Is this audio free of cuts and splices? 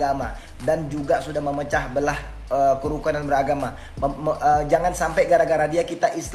yes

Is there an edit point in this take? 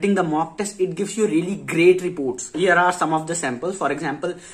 yes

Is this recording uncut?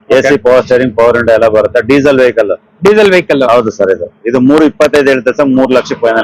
yes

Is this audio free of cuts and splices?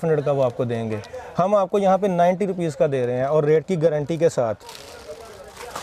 yes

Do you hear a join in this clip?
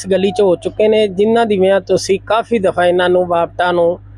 no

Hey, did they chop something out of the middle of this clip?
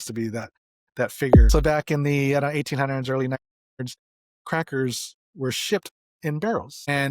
yes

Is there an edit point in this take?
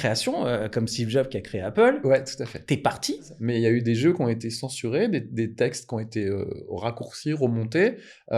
yes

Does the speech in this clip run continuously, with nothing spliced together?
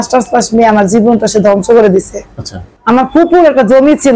no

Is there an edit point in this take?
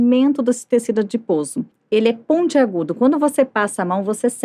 yes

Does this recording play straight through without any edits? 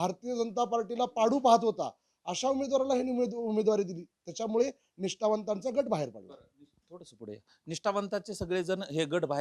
yes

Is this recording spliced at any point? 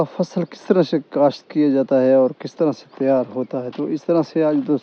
no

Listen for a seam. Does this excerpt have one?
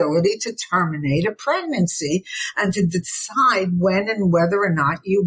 no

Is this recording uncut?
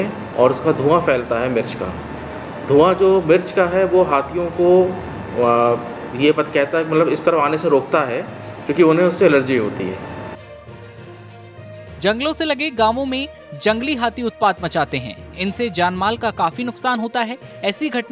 no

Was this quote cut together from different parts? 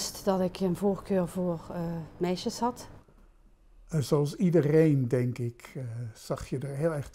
yes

